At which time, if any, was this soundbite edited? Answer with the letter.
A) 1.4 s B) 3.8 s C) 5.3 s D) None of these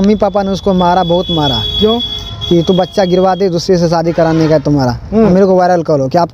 C